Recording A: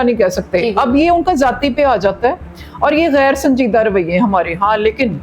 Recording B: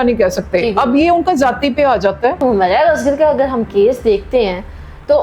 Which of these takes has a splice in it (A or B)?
B